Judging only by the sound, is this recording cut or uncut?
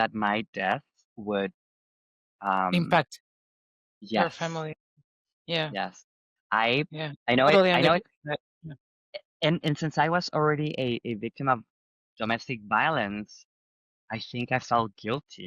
uncut